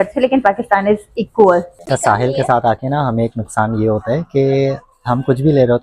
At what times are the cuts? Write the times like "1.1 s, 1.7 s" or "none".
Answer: 1.7 s